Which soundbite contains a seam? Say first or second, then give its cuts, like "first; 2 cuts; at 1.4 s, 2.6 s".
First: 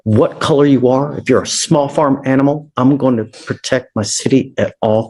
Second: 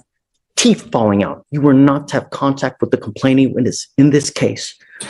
second; 1 cut; at 1.4 s